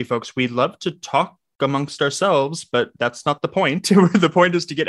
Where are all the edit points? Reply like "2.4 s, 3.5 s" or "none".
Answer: none